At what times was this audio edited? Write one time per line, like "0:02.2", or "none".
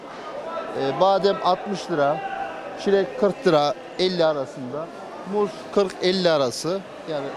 none